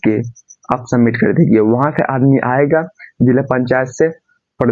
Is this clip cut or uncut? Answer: uncut